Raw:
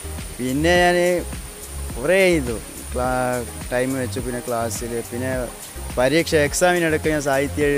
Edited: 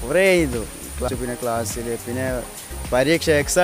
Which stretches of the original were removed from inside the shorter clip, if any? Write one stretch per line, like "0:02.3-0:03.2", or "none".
0:03.0-0:04.1